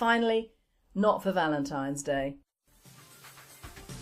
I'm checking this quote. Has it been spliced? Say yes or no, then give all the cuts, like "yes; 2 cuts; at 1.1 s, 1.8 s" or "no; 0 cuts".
no; 0 cuts